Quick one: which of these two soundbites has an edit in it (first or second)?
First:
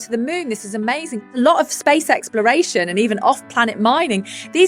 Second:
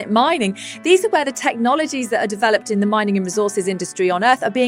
first